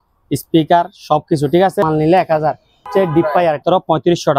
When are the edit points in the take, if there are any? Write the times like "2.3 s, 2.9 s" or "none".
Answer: 1.8 s, 2.9 s, 3.6 s